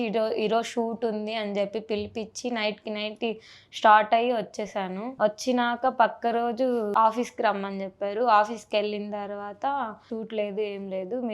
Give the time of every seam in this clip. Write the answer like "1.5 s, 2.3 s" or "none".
5.0 s, 6.9 s, 10.0 s